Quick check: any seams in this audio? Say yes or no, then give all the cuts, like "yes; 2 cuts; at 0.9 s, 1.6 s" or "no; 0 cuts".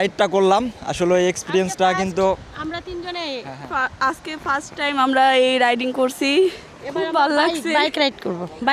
no; 0 cuts